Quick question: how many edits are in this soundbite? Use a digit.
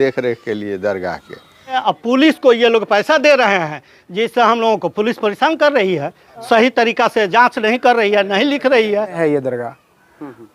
2